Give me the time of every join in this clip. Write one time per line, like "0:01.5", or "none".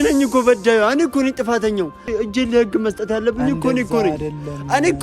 0:02.1